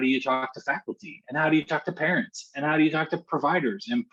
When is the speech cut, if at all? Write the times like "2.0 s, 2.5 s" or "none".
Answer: none